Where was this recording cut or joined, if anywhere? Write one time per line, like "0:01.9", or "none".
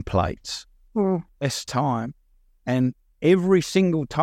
none